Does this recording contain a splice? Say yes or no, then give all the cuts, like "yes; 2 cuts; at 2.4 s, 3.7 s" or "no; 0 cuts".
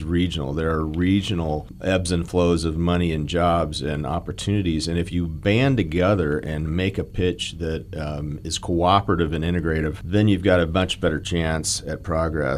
yes; 2 cuts; at 1.7 s, 10.0 s